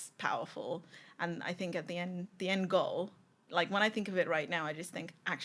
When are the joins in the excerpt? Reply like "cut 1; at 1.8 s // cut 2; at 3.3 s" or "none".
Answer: none